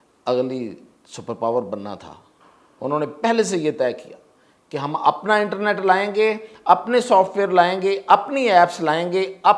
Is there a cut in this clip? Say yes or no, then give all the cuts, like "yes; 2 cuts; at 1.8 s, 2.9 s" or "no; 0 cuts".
no; 0 cuts